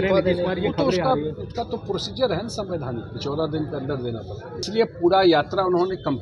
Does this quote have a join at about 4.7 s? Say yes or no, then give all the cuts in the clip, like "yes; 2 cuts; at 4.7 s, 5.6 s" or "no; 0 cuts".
yes; 1 cut; at 4.7 s